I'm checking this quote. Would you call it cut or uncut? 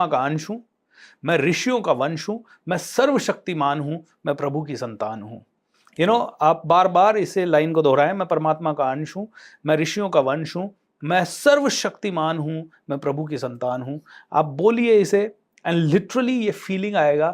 uncut